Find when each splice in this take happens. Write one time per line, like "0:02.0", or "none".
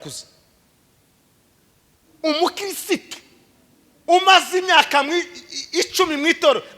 0:02.0